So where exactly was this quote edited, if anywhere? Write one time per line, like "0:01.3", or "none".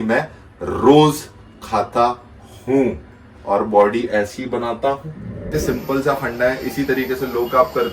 0:05.5